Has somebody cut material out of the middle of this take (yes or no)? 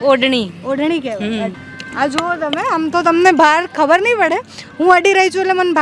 yes